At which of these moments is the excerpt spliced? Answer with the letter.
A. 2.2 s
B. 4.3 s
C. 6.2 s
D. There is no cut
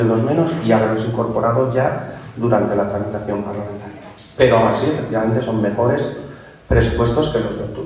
D